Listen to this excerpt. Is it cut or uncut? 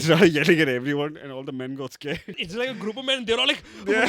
cut